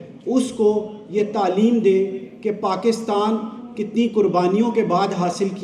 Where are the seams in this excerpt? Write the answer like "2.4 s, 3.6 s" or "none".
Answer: none